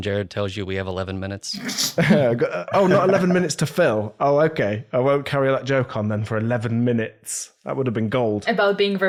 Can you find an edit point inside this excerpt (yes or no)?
no